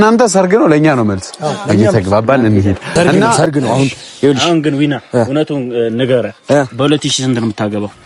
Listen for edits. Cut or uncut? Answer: cut